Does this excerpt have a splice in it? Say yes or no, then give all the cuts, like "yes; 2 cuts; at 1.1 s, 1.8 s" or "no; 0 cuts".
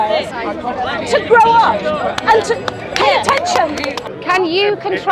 yes; 1 cut; at 4.0 s